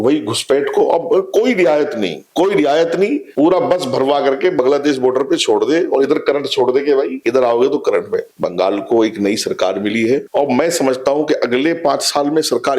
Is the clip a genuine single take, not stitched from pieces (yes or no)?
no